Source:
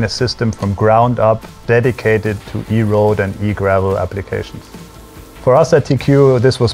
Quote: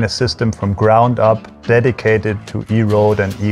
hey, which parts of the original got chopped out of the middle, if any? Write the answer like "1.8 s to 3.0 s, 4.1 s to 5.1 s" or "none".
none